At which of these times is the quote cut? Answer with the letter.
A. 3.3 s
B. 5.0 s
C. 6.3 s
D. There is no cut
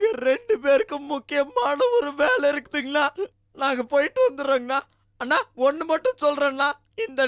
D